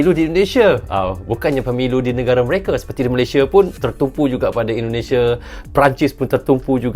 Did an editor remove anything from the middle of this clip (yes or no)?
no